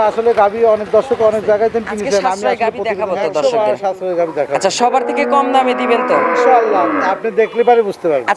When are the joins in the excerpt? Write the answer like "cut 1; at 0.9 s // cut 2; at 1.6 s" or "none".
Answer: cut 1; at 2.3 s